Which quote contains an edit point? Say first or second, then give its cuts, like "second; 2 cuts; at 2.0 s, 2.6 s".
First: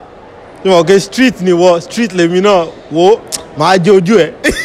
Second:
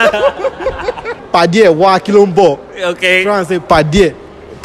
second; 1 cut; at 1.2 s